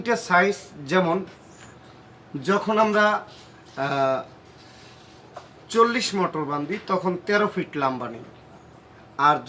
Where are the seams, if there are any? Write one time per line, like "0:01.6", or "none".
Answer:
none